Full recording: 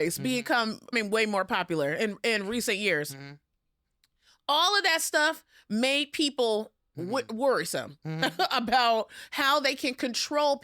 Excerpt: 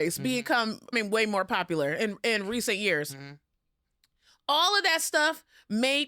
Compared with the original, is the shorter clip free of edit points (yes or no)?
yes